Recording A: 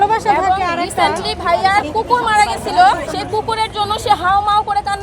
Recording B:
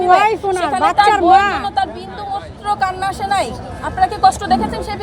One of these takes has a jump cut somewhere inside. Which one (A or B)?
A